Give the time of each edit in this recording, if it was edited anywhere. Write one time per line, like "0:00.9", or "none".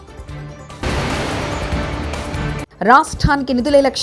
0:00.8
0:02.7